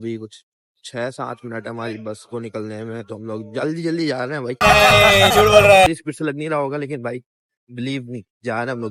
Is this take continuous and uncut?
yes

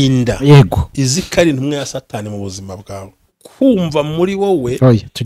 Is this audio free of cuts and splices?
no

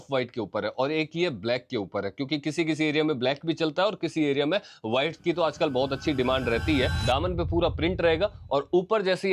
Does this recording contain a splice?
yes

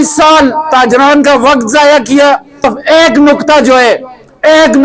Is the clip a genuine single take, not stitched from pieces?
no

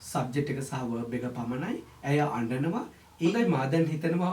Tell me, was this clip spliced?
yes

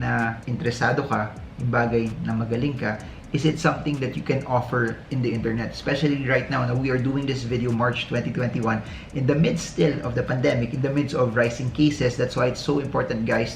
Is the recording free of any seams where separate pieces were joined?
yes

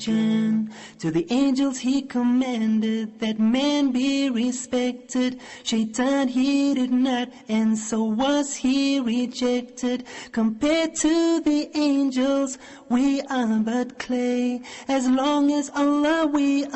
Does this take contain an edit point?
no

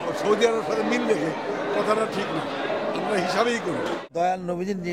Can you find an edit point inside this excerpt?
yes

